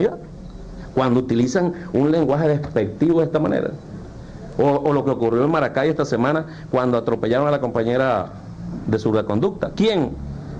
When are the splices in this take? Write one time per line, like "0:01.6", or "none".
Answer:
0:05.8